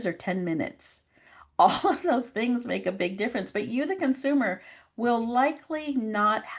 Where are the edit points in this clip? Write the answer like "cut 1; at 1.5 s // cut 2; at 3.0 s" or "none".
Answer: none